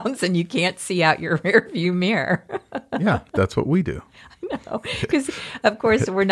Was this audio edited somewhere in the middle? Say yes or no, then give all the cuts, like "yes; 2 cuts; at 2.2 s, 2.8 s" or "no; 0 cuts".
no; 0 cuts